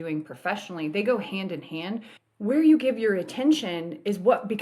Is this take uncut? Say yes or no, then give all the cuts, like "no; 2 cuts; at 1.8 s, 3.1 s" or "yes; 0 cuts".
no; 1 cut; at 2.2 s